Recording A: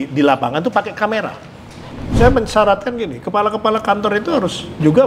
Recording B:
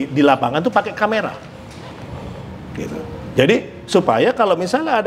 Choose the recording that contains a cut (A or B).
A